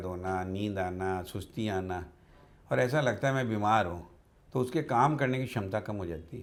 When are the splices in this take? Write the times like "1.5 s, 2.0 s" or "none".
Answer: none